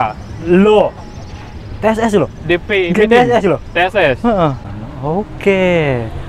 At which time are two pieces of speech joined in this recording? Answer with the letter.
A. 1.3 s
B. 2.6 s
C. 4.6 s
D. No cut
C